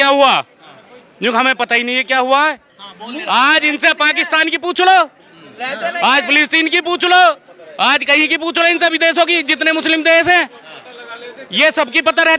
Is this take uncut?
yes; 0 cuts

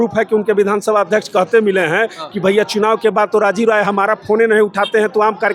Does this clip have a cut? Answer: no; 0 cuts

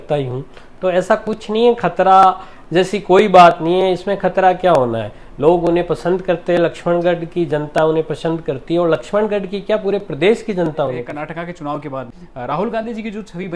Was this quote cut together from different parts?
yes; 2 cuts; at 11.1 s, 12.2 s

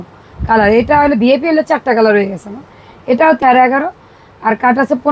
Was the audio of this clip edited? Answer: yes; 1 cut; at 3.4 s

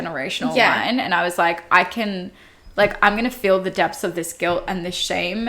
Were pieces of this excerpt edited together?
no; 0 cuts

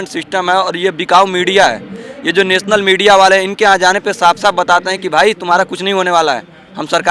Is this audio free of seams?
yes; 0 cuts

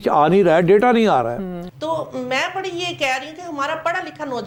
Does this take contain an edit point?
no; 0 cuts

